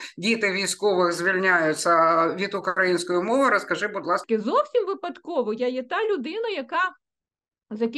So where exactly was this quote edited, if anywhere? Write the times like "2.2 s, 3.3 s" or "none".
4.2 s